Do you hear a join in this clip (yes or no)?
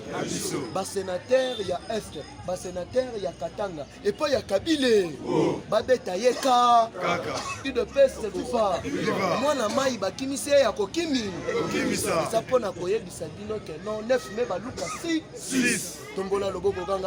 no